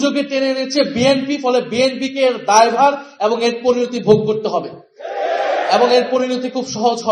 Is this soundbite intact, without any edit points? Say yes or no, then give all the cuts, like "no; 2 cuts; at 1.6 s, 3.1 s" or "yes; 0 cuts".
yes; 0 cuts